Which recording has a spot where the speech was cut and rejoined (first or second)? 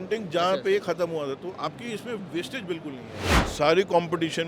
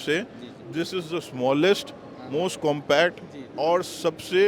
first